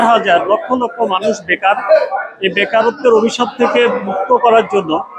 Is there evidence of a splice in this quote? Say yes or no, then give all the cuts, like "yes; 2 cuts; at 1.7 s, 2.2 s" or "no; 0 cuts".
no; 0 cuts